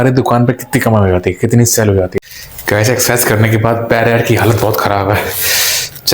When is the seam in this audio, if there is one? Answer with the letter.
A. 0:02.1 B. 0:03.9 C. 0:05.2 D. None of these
A